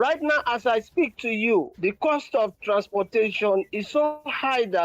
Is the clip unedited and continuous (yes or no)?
yes